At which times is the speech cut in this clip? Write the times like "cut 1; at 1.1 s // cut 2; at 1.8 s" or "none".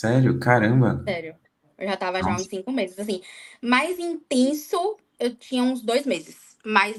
none